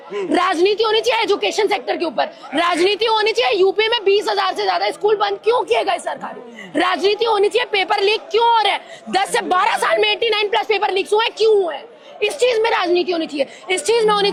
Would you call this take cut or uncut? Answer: uncut